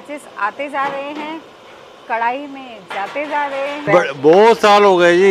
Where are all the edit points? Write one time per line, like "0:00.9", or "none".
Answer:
0:03.9